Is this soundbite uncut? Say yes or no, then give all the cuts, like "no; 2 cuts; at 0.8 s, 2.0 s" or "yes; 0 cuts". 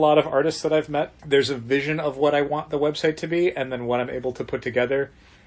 no; 1 cut; at 1.2 s